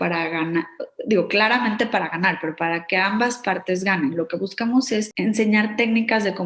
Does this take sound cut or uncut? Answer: cut